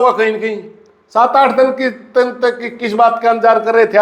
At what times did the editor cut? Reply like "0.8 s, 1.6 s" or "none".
1.8 s